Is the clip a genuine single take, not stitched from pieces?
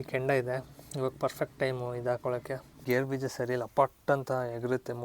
no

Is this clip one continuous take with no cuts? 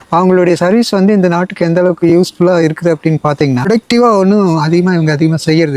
no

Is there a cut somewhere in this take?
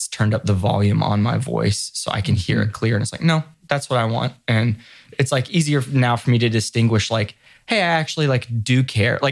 no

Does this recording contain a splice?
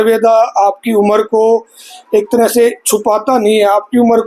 no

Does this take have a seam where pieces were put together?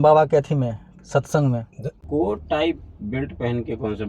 yes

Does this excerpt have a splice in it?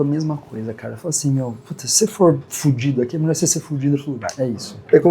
yes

